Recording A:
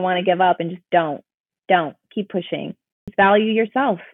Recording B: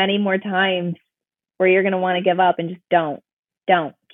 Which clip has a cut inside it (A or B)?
A